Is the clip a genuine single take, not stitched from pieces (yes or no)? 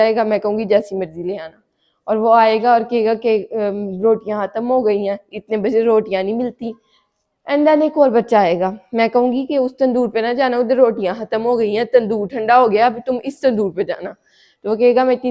yes